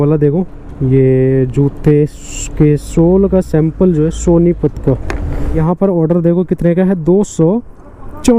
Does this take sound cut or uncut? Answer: cut